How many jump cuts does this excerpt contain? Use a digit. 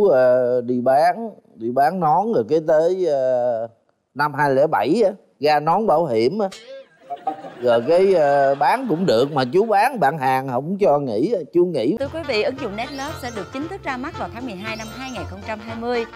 1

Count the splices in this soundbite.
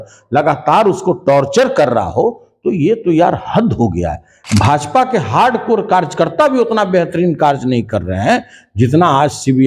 1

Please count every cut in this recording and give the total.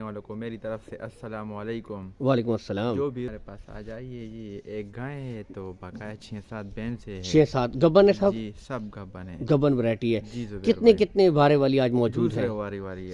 1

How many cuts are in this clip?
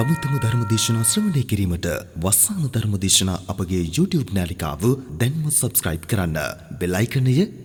0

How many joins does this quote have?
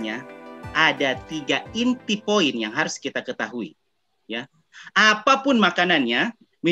0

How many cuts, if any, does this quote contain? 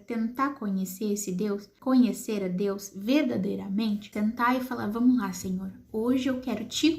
2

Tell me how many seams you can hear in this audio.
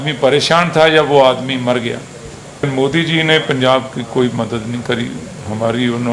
1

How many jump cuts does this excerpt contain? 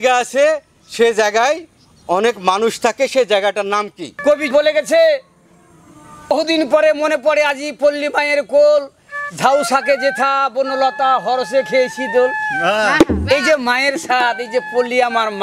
2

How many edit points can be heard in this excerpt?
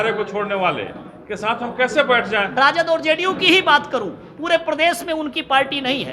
1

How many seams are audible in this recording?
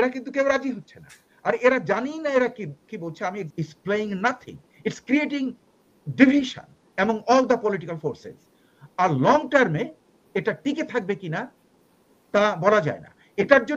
1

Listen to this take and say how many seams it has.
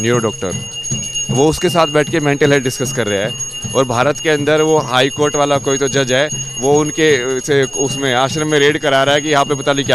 0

